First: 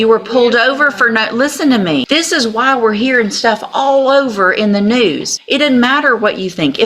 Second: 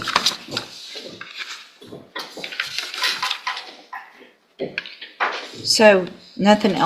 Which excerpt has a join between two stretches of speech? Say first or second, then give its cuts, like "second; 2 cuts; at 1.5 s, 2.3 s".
first; 2 cuts; at 2.0 s, 5.3 s